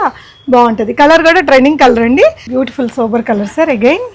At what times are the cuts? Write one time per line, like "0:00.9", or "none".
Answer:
0:02.4